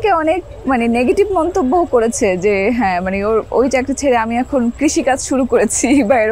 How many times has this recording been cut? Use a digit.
0